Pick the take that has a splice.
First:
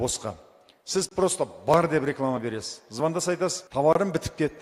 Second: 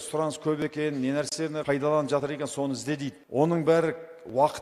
second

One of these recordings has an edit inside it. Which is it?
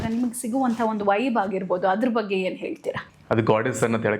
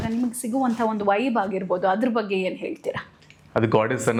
first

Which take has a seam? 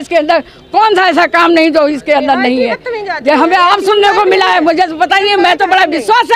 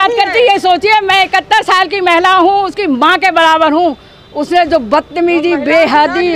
second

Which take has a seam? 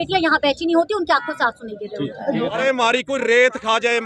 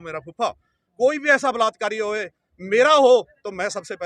first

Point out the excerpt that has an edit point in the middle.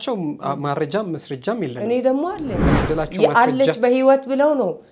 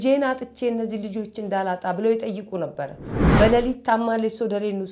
first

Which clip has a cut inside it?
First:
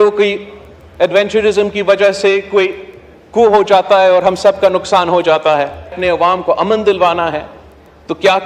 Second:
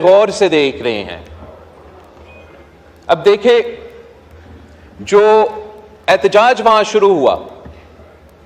first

